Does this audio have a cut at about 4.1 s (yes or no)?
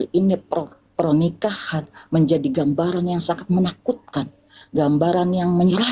no